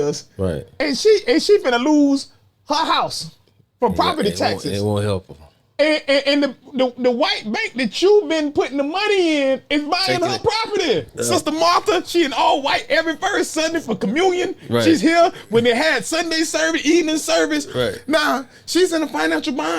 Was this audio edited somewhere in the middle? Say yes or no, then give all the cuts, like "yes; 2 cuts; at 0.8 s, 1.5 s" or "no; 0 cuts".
yes; 1 cut; at 11.1 s